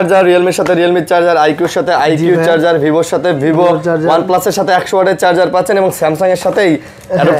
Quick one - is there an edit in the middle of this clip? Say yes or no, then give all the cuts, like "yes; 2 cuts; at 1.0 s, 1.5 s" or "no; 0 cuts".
no; 0 cuts